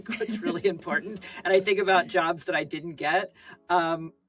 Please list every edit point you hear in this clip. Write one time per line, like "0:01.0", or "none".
none